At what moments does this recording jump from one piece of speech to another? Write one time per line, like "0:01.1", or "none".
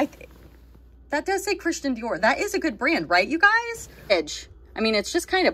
0:04.1